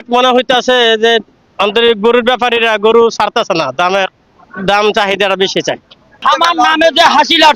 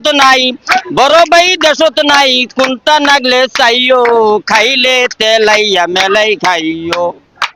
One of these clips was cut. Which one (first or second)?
first